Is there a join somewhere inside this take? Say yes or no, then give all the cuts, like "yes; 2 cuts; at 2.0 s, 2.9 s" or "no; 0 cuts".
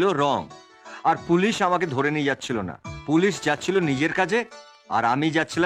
no; 0 cuts